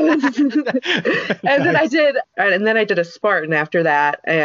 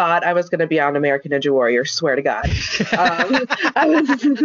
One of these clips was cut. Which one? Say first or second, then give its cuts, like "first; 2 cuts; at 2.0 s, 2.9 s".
first; 1 cut; at 2.3 s